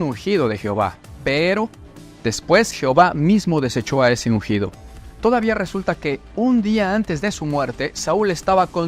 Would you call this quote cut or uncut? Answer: cut